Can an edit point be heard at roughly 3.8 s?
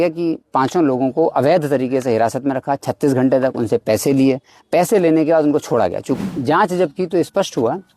no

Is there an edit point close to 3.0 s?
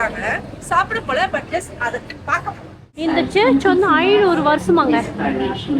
yes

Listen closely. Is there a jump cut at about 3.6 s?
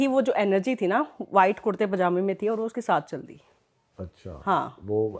no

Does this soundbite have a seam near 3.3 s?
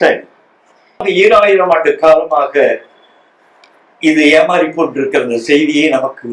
no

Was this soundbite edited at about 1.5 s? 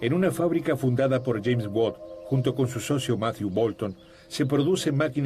no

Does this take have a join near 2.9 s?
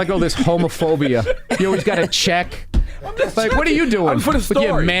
yes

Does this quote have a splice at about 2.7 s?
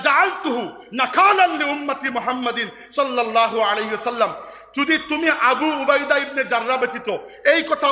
no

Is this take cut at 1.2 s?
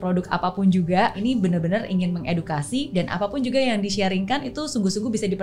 yes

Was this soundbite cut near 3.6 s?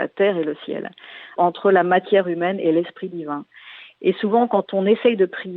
no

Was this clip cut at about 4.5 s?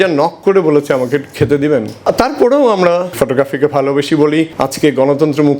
yes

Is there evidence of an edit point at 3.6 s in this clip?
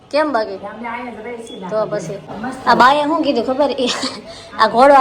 no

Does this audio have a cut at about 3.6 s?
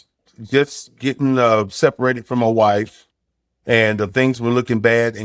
no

